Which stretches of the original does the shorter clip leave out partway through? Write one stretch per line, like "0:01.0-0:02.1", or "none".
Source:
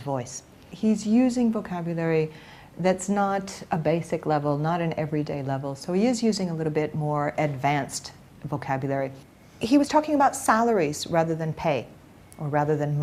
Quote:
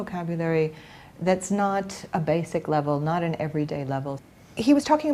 0:05.8-0:09.2